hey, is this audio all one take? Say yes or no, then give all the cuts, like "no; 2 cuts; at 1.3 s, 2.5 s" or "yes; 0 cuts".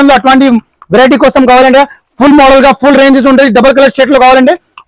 yes; 0 cuts